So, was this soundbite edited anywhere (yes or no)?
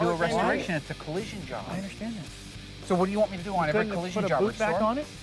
no